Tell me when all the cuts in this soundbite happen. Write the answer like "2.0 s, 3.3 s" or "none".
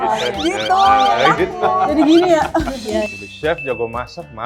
3.1 s